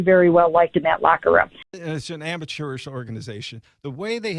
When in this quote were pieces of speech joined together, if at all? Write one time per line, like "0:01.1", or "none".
0:01.6